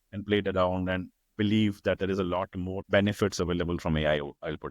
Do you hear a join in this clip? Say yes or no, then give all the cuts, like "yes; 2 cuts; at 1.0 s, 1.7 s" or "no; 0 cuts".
yes; 1 cut; at 2.8 s